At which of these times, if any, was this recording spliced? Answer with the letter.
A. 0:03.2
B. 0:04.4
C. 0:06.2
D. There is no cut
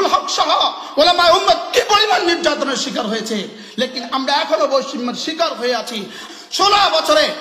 C